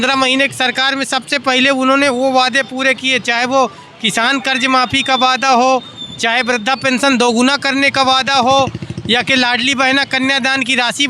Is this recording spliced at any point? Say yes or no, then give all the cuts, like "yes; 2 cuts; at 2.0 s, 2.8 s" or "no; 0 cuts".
no; 0 cuts